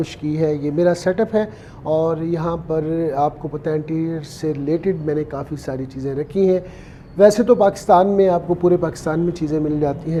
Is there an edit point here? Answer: no; 0 cuts

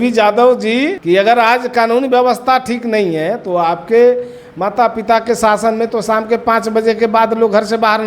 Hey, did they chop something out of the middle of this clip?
yes; 1 cut; at 1.0 s

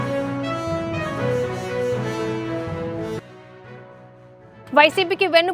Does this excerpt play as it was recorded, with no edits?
no; 1 cut; at 3.1 s

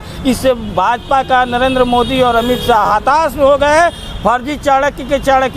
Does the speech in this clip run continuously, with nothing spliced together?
yes; 0 cuts

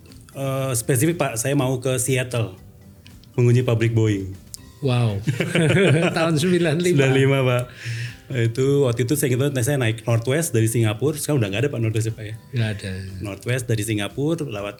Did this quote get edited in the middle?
no; 0 cuts

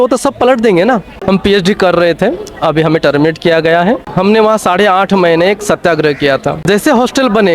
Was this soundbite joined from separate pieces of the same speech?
yes; 3 cuts; at 1.1 s, 4.1 s, 6.6 s

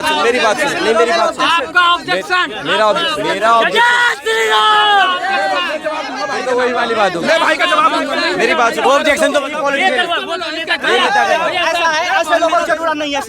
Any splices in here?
yes; 1 cut; at 8.8 s

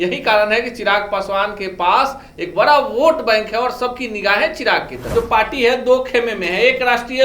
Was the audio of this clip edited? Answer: yes; 1 cut; at 5.0 s

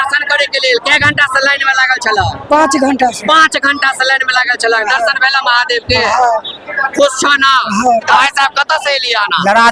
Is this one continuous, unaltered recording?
no; 1 cut; at 8.1 s

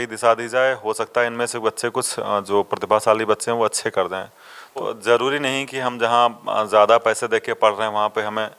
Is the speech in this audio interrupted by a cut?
yes; 1 cut; at 4.9 s

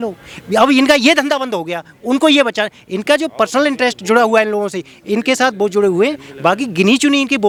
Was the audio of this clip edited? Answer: no; 0 cuts

